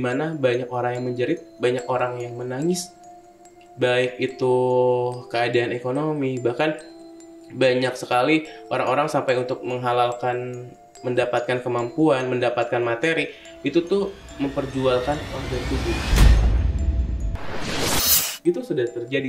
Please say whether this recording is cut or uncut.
uncut